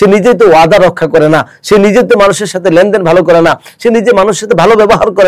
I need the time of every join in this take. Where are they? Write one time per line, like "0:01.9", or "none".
none